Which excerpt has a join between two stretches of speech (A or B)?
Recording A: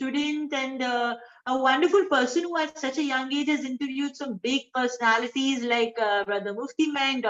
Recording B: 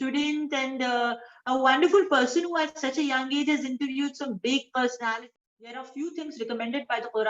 B